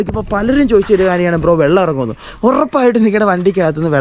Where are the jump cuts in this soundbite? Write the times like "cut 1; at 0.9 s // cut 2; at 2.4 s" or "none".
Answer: none